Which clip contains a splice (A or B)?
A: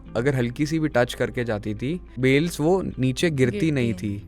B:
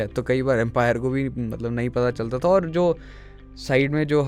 A